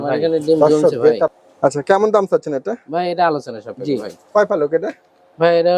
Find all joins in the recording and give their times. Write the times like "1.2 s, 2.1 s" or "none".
3.7 s